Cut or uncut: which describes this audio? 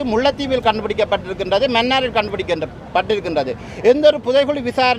uncut